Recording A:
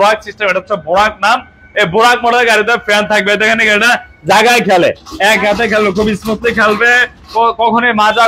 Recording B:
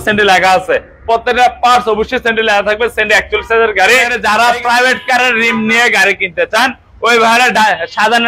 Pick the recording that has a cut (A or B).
B